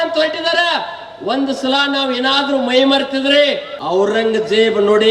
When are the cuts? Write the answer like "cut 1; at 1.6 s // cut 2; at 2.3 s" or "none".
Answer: cut 1; at 3.7 s